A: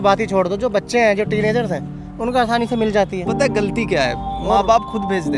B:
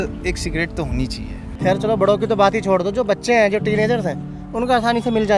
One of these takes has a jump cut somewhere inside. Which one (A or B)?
B